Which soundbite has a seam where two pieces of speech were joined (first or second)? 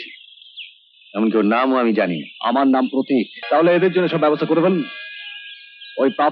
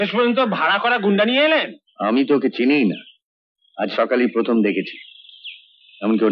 first